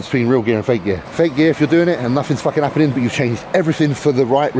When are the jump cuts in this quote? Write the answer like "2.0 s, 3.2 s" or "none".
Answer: 1.1 s